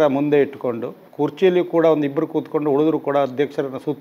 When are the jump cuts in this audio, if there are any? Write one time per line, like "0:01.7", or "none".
0:01.0